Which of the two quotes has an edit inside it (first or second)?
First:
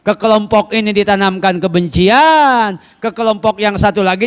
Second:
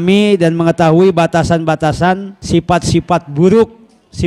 second